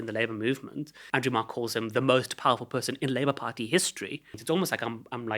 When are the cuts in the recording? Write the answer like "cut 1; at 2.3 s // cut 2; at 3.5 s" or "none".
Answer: cut 1; at 1.0 s // cut 2; at 4.3 s